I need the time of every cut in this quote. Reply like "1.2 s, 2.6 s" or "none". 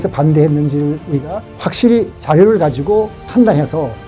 1.9 s, 3.2 s